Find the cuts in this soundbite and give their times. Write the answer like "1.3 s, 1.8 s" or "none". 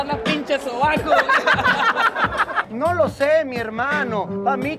2.6 s